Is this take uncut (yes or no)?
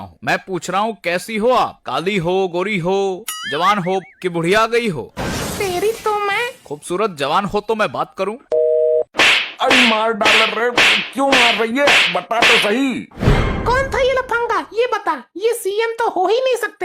yes